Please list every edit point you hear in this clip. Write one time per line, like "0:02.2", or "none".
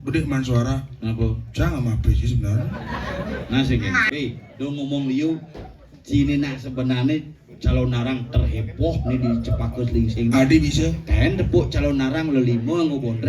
0:04.1